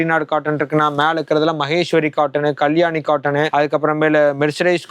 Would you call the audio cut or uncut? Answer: uncut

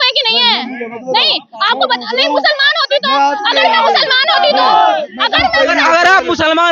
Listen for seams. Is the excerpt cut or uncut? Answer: uncut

